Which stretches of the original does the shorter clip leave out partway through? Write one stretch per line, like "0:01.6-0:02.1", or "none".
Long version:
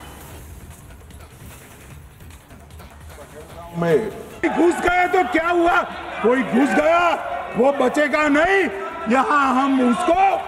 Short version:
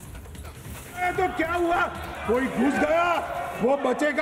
0:01.7-0:04.9